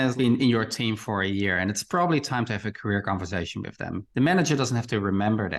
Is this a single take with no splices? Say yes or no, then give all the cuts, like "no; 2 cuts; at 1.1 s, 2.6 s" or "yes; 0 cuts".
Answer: yes; 0 cuts